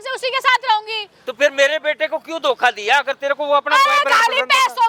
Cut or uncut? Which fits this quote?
uncut